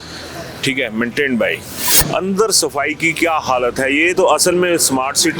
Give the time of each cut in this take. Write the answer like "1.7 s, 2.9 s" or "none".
1.9 s